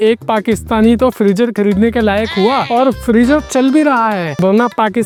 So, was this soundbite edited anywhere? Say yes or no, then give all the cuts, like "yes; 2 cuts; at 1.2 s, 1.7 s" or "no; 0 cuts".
no; 0 cuts